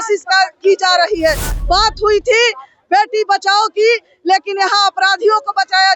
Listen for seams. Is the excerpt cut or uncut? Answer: uncut